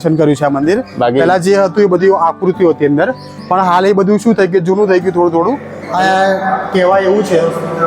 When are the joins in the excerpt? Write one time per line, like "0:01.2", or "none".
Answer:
0:05.8